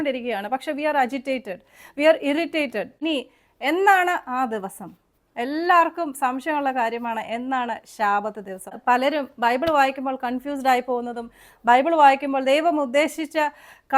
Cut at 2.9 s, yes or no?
yes